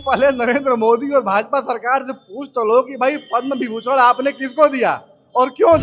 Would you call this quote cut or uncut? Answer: uncut